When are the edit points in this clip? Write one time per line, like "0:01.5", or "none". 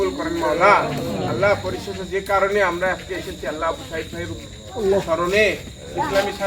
none